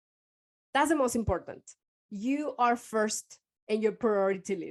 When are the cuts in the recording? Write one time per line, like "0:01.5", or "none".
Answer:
none